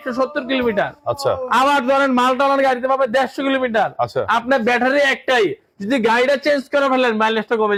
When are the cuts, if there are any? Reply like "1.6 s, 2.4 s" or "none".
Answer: none